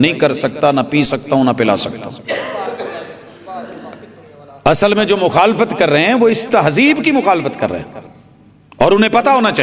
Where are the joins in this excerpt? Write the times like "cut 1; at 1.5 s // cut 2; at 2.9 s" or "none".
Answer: none